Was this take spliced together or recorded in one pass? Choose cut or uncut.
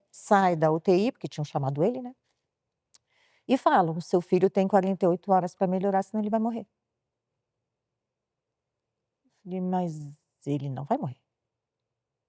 uncut